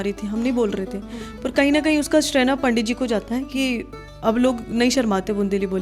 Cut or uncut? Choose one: uncut